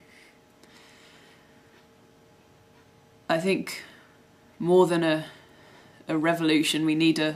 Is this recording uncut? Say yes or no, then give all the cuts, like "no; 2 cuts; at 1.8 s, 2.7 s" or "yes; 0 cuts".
yes; 0 cuts